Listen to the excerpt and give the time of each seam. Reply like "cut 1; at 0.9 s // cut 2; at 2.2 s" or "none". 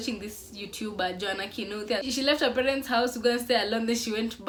none